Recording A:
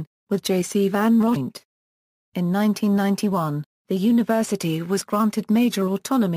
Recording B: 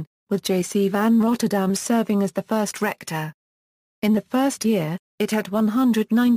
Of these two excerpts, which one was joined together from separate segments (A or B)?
B